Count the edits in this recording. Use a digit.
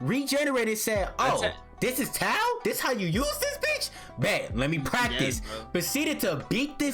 0